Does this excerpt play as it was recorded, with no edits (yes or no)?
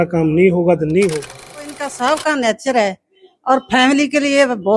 no